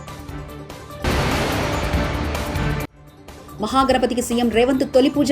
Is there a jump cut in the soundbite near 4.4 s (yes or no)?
no